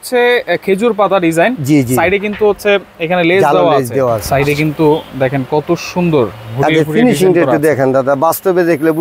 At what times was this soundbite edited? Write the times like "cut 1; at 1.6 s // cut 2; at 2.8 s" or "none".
cut 1; at 4.2 s